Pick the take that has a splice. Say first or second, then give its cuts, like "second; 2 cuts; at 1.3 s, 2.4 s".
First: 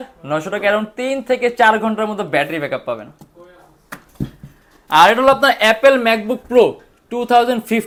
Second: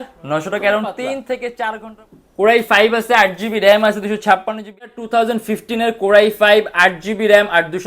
second; 2 cuts; at 1.9 s, 4.8 s